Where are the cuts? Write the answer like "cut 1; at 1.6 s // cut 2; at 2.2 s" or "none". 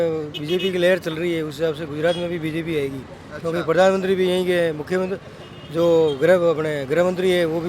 none